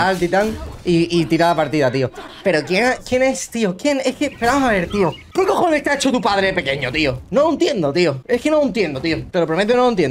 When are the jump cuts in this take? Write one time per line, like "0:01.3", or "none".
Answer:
0:05.2
0:08.2
0:09.2